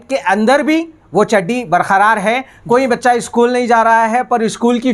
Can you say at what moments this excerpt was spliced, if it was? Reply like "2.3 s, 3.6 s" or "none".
2.5 s